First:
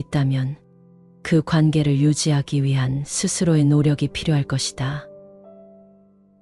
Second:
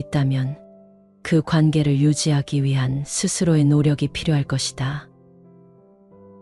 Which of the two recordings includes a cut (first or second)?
first